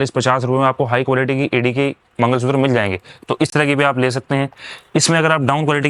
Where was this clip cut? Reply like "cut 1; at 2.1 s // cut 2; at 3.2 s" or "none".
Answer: none